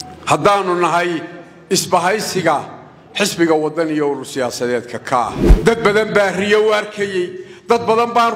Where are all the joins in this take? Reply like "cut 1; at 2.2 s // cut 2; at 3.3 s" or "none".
cut 1; at 5.5 s